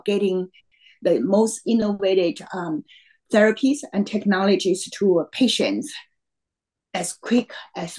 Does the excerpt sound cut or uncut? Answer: uncut